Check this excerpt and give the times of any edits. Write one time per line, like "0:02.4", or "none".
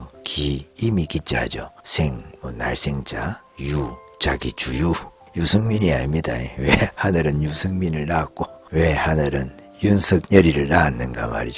0:01.8
0:04.1
0:10.2